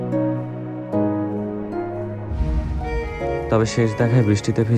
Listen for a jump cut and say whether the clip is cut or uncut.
cut